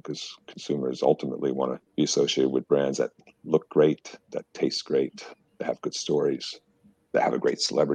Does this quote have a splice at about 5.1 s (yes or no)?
no